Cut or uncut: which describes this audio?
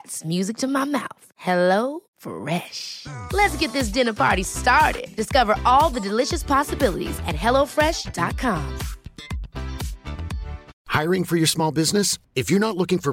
cut